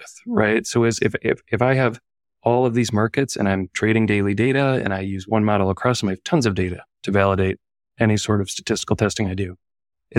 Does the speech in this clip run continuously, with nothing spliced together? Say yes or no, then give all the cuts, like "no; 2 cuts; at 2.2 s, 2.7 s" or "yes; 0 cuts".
yes; 0 cuts